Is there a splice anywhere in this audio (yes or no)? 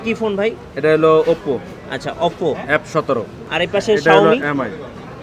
yes